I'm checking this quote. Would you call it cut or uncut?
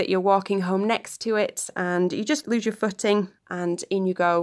cut